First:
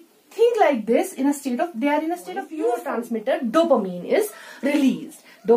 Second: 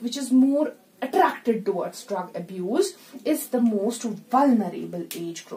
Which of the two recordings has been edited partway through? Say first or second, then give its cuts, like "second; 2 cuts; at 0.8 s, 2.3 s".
first; 1 cut; at 2.8 s